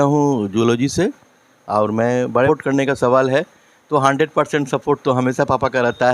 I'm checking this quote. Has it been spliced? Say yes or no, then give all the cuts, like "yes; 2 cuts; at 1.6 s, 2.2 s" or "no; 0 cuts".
yes; 1 cut; at 2.5 s